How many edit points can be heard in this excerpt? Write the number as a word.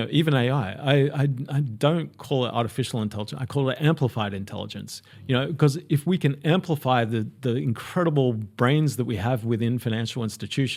zero